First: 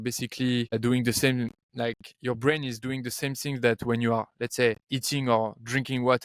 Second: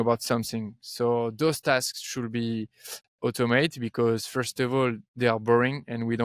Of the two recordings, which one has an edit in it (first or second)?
first